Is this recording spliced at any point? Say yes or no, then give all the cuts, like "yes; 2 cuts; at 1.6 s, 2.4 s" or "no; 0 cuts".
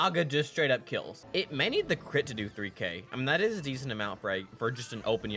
yes; 1 cut; at 1.2 s